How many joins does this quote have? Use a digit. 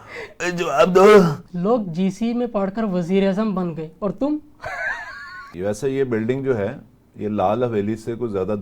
2